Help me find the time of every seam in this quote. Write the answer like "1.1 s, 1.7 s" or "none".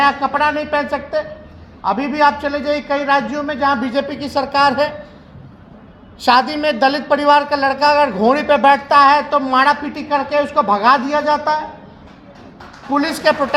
none